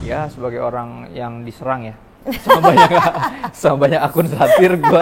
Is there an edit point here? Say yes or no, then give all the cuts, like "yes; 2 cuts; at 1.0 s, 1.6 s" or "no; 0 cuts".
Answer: no; 0 cuts